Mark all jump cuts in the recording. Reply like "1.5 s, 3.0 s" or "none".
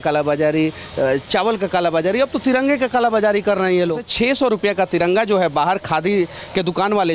4.1 s